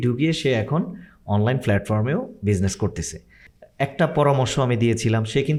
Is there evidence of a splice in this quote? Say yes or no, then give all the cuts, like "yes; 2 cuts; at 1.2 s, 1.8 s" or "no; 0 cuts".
no; 0 cuts